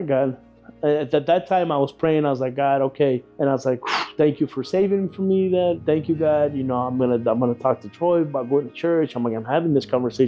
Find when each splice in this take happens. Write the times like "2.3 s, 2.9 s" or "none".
3.3 s, 5.8 s